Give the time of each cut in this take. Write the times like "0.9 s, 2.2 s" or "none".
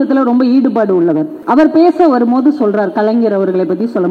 1.3 s